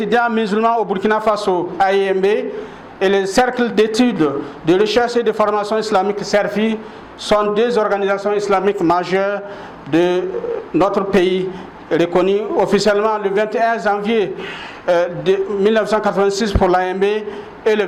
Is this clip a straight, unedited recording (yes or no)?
yes